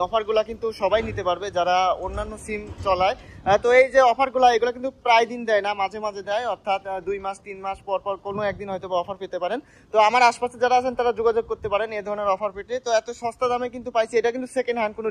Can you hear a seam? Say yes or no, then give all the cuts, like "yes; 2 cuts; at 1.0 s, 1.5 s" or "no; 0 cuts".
no; 0 cuts